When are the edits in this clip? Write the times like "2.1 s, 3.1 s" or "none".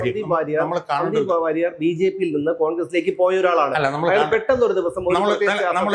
none